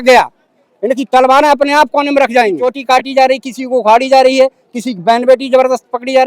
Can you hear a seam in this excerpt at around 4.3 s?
no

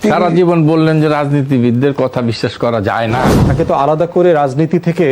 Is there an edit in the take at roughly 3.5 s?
yes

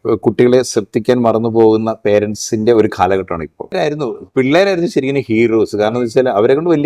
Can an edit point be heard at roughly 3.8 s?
yes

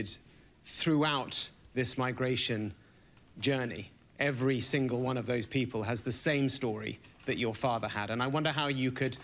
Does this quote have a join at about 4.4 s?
yes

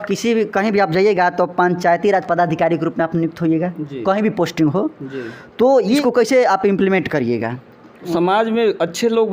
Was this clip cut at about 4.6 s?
no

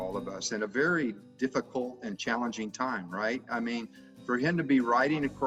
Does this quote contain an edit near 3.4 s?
no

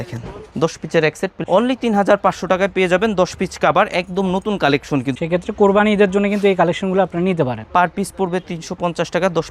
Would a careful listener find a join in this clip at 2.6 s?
no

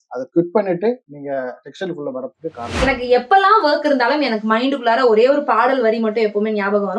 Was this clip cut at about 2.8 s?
yes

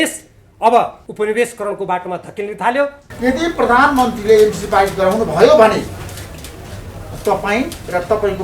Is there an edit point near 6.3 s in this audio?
no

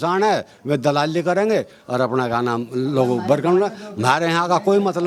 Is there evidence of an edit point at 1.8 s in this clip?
no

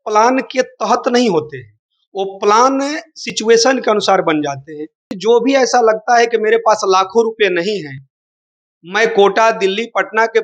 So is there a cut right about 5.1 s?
yes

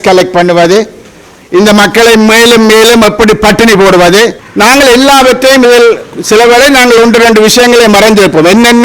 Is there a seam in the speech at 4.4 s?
yes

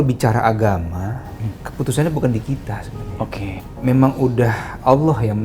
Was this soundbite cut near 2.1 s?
no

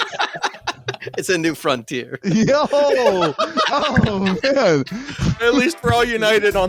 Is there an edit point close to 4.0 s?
no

